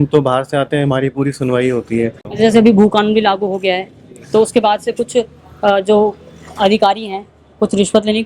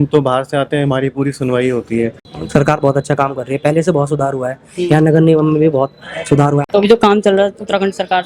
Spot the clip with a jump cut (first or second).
second